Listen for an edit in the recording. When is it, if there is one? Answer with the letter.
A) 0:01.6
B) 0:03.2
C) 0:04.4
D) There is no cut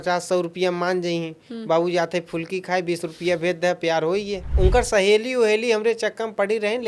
C